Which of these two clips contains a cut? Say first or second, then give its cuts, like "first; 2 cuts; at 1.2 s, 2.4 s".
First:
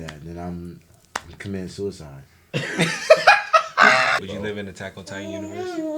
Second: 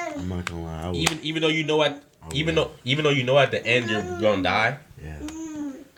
first; 1 cut; at 4.2 s